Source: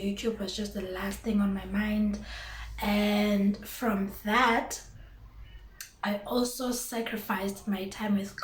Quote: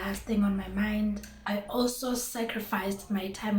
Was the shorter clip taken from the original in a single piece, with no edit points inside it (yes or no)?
no